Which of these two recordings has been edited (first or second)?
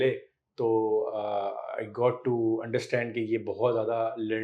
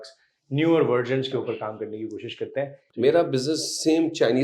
second